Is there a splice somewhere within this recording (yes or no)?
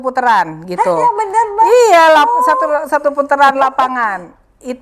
no